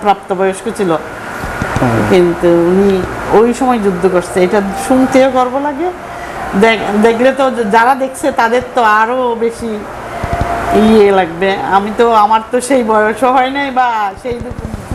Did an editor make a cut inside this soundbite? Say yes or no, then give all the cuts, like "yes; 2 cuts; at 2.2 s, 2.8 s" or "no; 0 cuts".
no; 0 cuts